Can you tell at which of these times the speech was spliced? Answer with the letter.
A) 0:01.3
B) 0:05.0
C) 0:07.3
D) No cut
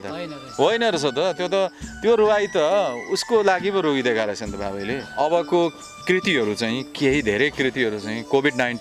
B